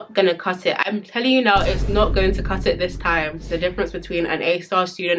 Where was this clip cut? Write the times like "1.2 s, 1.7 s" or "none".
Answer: 3.4 s